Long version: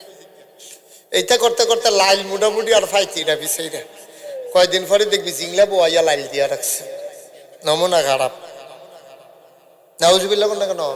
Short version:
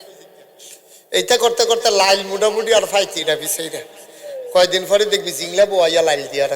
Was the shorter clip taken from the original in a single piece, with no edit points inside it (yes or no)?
yes